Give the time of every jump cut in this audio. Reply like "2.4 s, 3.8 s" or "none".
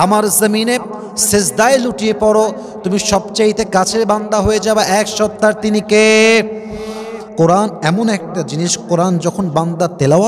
7.2 s